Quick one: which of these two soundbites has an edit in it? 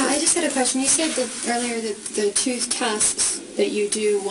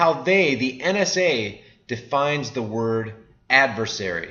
first; 1 cut; at 2.7 s

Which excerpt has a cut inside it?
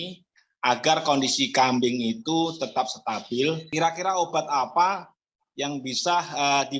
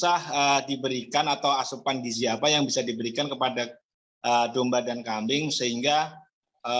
first; 1 cut; at 3.6 s

